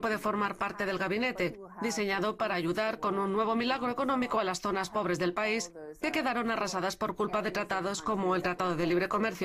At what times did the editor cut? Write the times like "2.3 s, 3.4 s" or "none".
6.9 s